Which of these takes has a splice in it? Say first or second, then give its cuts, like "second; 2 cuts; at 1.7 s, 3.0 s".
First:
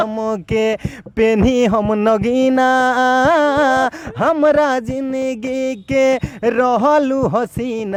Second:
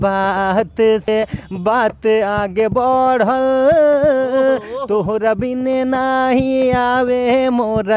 second; 1 cut; at 1.1 s